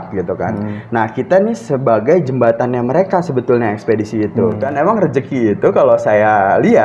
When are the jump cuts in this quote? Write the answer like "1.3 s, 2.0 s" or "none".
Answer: 4.7 s

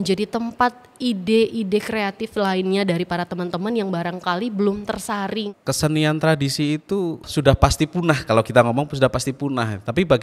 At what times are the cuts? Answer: 5.5 s, 7.2 s

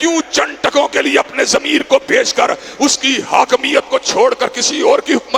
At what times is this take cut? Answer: none

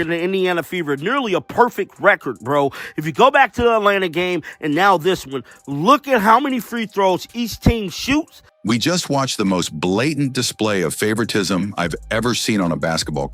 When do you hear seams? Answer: none

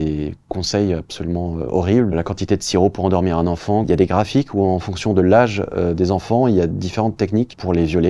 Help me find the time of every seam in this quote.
2.1 s, 3.8 s

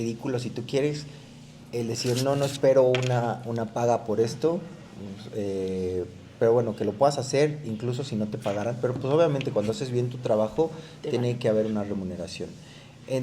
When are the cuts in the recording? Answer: none

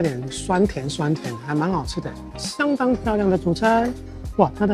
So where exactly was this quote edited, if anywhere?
2.4 s

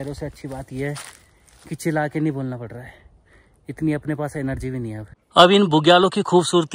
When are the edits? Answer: 5.1 s

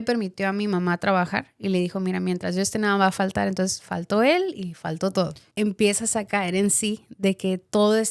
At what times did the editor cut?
5.4 s

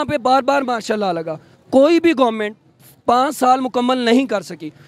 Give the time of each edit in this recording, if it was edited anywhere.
none

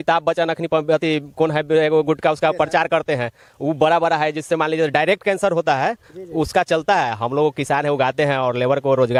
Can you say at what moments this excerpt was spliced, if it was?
none

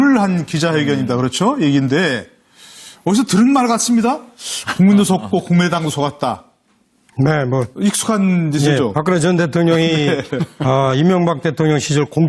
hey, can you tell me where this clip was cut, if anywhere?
6.4 s

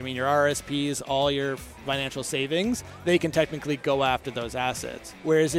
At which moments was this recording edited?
none

